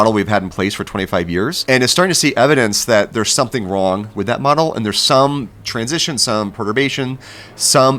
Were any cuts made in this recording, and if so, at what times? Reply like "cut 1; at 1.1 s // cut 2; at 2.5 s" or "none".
cut 1; at 1.6 s